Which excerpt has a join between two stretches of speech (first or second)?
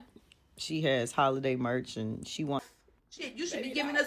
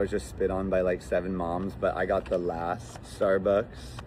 first